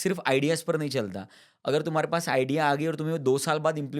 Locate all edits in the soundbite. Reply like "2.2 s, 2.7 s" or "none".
none